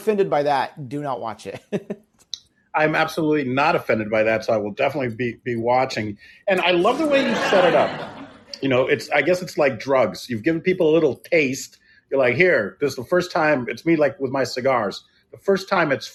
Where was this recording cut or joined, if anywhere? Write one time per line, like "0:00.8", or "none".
none